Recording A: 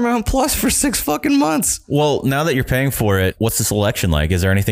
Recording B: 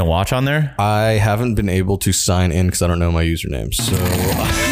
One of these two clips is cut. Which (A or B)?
A